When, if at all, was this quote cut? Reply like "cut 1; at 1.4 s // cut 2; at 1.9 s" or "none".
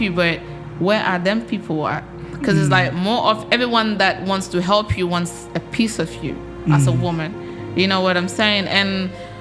none